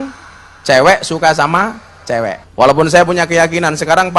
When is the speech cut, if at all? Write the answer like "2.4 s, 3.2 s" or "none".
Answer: 2.4 s